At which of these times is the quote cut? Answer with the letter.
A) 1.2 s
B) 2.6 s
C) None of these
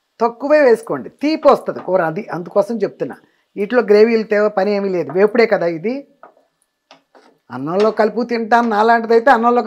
C